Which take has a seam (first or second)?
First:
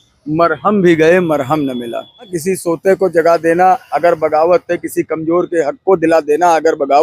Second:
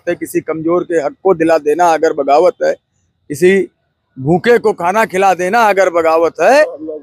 first